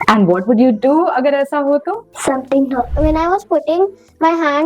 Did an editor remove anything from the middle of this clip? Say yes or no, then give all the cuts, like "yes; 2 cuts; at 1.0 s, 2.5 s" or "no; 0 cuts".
yes; 2 cuts; at 2.0 s, 2.9 s